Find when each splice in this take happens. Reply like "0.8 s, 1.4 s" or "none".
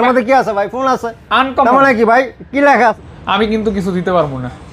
3.0 s